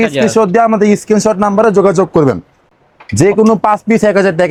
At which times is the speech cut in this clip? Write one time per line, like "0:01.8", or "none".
none

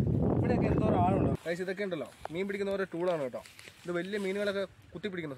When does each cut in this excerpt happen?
0:01.4

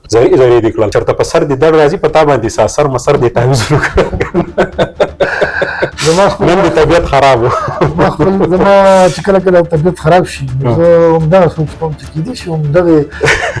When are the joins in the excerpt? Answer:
0:00.9

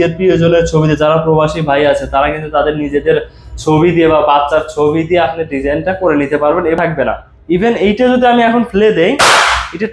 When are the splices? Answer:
0:06.8

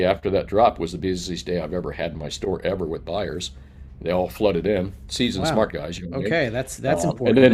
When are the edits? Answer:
none

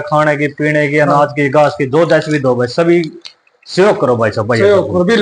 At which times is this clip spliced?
none

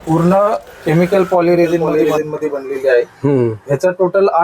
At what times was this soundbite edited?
0:01.9

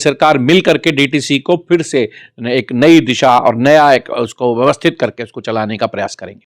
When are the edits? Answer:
none

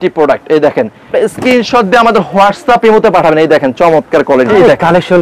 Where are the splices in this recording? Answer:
0:01.0
0:04.5

